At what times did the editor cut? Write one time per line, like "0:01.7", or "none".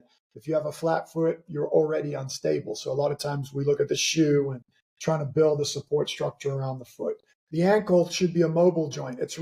0:07.3